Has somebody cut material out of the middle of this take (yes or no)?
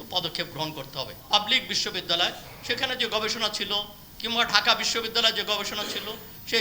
yes